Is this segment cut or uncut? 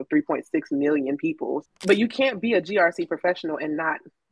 cut